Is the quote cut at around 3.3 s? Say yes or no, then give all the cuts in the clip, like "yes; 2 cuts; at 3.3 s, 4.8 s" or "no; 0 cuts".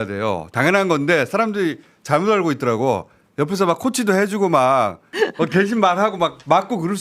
no; 1 cut; at 5.1 s